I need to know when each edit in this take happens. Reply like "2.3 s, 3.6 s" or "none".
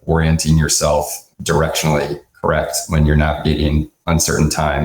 3.9 s